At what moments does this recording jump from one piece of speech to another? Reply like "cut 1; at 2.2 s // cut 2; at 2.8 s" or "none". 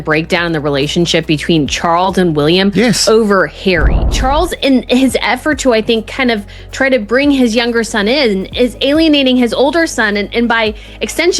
cut 1; at 4.1 s